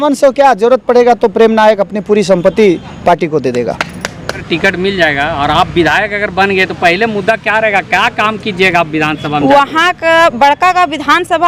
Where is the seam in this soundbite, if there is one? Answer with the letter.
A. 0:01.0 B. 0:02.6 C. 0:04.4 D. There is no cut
C